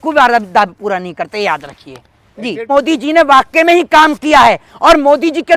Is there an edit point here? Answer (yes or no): yes